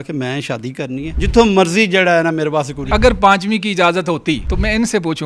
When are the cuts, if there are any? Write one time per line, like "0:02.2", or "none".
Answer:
0:01.1
0:02.9
0:04.5

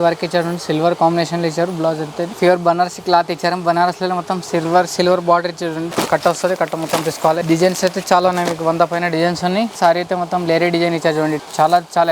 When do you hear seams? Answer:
0:02.3
0:05.9
0:07.4
0:09.7
0:11.4

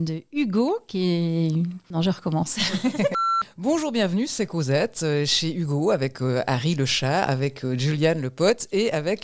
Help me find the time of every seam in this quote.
0:01.8
0:03.4

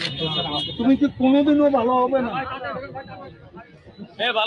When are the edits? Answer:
none

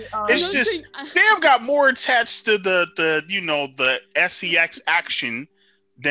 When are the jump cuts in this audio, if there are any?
none

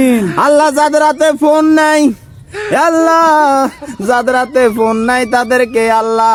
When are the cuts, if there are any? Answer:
none

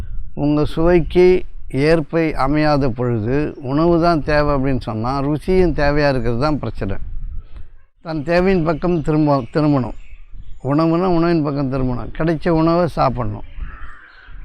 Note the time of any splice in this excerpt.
0:08.1

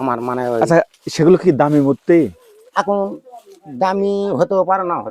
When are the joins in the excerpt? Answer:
none

